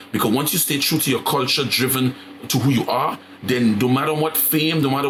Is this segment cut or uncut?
uncut